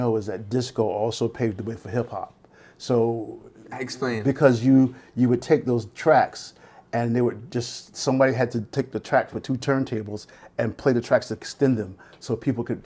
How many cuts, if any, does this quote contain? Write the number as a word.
zero